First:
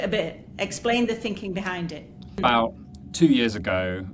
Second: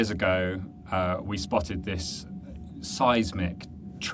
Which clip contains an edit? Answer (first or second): first